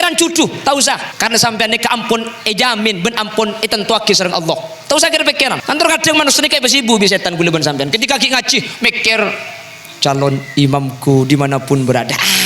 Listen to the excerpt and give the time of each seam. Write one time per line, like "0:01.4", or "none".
0:01.1
0:05.6